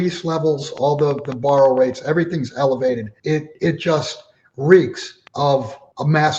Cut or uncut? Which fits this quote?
cut